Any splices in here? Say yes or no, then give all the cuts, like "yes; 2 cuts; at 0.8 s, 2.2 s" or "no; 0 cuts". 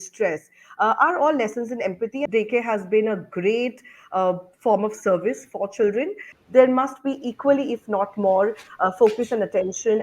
yes; 2 cuts; at 2.3 s, 6.3 s